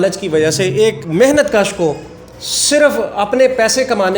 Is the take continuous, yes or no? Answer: no